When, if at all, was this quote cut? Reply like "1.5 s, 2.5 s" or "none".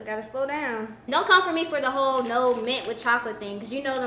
0.9 s